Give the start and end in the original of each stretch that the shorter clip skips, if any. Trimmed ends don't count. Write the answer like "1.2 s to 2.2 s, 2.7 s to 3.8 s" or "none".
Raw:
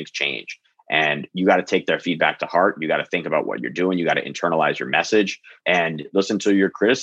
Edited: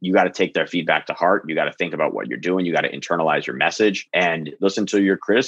5.4 s to 5.6 s

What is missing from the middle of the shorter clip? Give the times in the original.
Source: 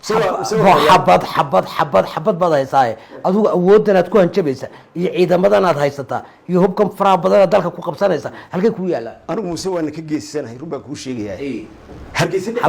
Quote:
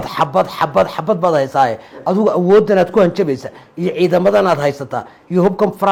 none

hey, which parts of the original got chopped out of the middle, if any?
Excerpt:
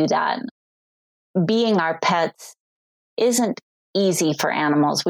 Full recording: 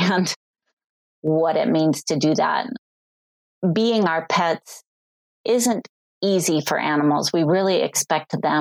none

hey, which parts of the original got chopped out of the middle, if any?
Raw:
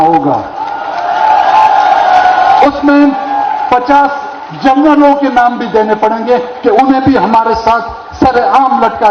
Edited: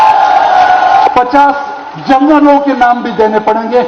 2.6 s to 3.6 s

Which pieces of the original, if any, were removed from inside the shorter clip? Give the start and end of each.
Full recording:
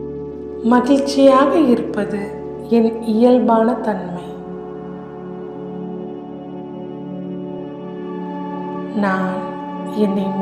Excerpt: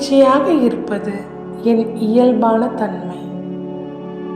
4.1 s to 6.8 s

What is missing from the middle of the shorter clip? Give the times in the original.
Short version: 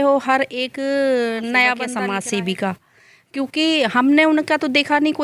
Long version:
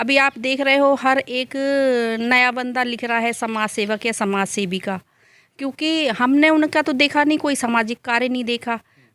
2.7 s to 4.2 s

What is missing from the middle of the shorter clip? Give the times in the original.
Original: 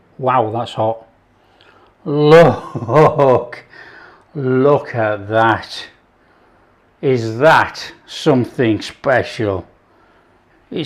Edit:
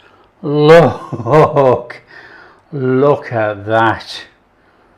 none

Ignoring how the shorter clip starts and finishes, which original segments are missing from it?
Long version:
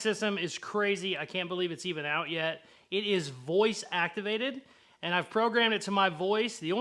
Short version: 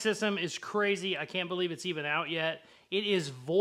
none

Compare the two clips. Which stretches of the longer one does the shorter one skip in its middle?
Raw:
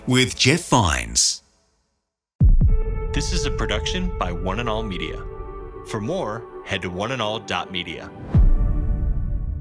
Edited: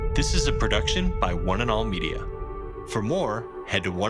none

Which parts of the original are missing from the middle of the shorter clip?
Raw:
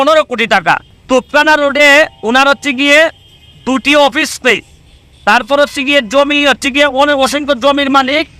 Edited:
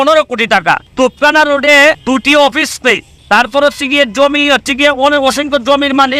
0.9 s to 1.0 s, 2.1 s to 3.6 s, 4.7 s to 5.1 s

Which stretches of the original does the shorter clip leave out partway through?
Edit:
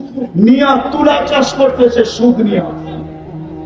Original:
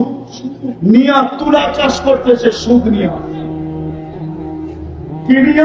3.1 s to 3.6 s

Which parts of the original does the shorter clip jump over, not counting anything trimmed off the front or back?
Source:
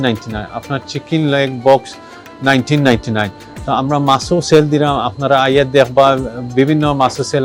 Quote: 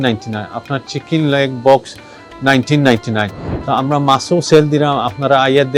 none

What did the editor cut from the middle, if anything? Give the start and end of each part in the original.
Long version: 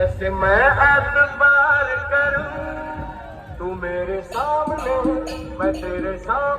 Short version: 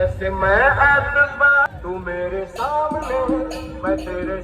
1.7 s to 3.4 s

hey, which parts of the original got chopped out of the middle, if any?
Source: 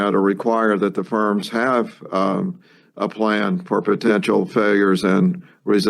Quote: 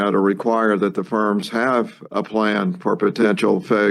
2.0 s to 2.8 s

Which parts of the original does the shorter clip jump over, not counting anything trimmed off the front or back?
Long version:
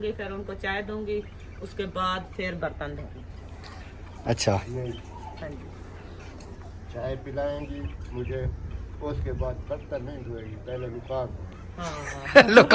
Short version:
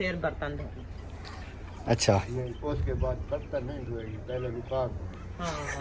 4.9 s to 8.9 s

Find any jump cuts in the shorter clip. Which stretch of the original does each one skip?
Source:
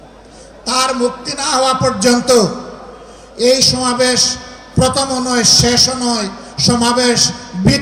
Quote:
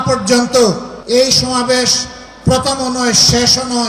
2.7 s to 3.2 s

